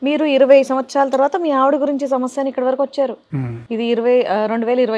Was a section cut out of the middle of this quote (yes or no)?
no